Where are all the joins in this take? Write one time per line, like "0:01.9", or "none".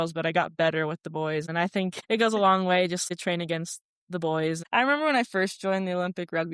0:01.9
0:03.0
0:04.6

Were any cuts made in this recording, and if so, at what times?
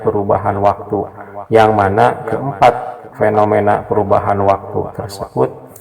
none

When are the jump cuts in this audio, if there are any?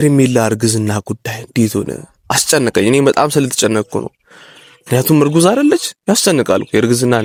none

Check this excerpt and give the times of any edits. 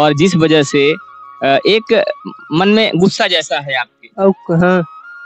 none

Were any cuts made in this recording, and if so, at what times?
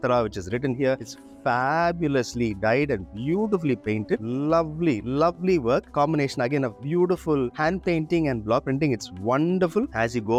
none

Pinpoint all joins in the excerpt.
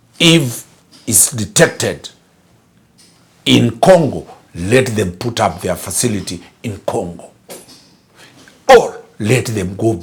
none

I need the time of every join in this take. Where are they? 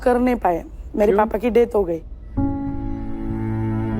0:02.2

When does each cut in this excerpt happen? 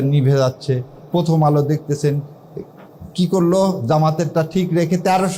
none

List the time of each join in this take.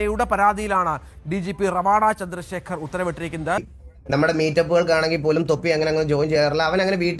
0:03.8

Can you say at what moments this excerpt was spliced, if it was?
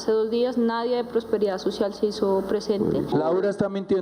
0:03.1

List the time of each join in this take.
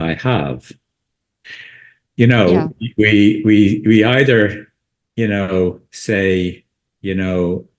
none

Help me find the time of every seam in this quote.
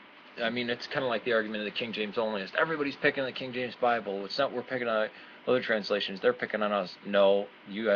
none

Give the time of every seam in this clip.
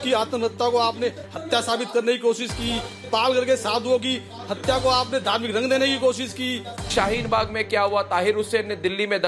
none

